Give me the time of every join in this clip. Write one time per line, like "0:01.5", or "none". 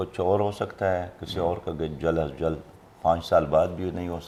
none